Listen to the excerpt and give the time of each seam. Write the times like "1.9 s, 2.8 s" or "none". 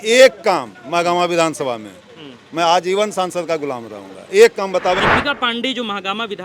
5.0 s